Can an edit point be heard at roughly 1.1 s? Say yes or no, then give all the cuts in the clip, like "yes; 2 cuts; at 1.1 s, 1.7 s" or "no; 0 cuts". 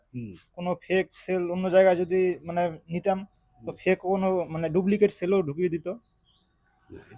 no; 0 cuts